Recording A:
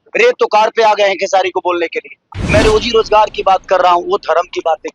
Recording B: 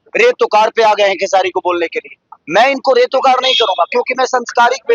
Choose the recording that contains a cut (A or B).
A